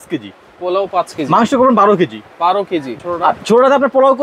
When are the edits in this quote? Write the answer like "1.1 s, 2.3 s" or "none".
2.9 s